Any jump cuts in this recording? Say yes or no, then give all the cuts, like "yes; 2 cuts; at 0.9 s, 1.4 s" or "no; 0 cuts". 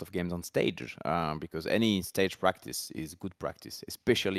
no; 0 cuts